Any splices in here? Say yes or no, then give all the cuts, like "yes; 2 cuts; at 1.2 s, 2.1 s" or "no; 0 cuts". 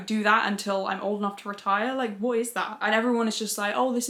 no; 0 cuts